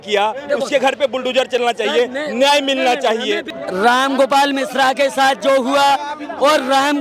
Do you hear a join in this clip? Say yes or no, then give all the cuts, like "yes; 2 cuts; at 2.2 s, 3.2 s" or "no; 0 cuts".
yes; 1 cut; at 3.5 s